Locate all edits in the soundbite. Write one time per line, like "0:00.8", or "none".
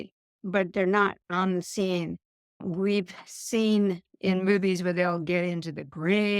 0:01.2

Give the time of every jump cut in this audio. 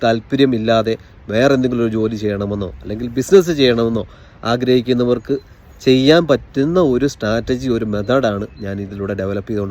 none

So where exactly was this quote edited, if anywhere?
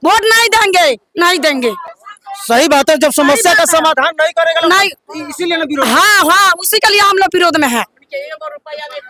none

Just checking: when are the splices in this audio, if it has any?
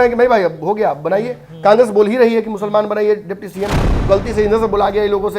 0:03.9

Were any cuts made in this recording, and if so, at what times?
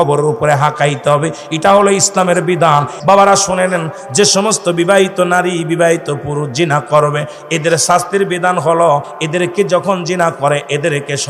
0:02.9
0:09.1

